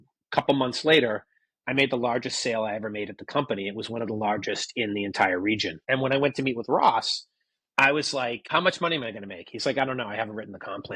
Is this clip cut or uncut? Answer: cut